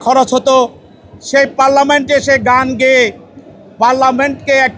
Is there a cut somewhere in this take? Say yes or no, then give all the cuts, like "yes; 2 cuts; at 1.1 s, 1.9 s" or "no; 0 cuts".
no; 0 cuts